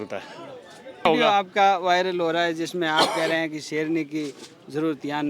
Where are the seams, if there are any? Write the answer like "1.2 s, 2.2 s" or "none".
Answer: 1.1 s